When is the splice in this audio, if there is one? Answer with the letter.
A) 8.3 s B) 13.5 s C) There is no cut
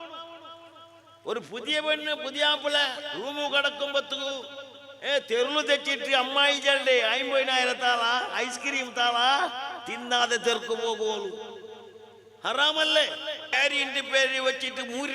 B